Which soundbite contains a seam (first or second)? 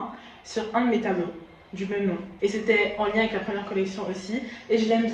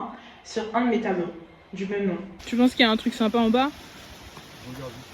second